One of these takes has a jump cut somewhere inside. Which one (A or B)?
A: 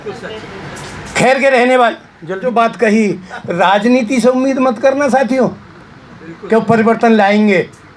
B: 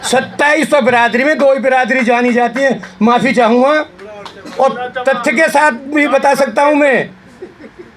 A